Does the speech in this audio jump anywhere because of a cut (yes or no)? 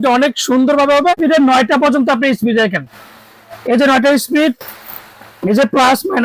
yes